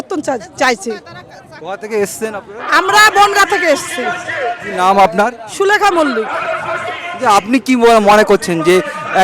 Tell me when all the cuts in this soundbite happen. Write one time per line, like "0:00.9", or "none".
none